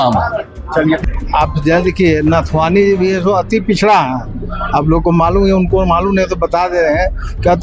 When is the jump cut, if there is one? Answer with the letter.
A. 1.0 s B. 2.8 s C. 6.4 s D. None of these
A